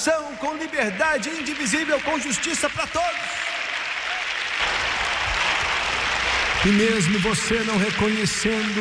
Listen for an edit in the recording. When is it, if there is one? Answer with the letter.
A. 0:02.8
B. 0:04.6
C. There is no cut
B